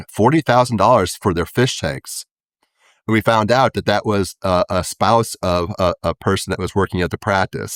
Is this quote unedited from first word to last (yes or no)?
yes